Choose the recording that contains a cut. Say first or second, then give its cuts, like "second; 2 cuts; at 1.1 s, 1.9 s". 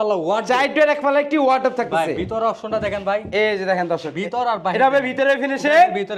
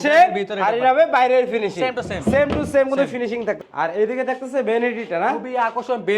second; 1 cut; at 3.6 s